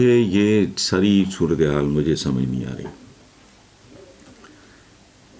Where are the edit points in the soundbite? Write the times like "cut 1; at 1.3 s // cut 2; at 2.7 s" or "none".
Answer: none